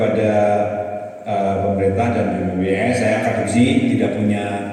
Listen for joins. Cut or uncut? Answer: uncut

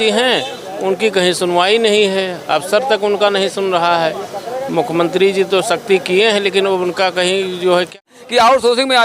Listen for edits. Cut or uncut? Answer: cut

